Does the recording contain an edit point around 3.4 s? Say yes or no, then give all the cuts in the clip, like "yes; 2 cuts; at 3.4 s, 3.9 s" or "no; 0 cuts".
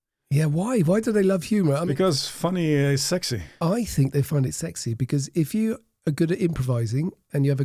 yes; 2 cuts; at 1.8 s, 3.4 s